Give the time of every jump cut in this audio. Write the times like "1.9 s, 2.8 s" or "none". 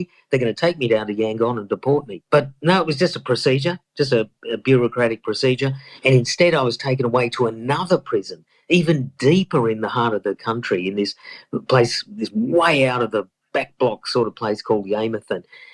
2.2 s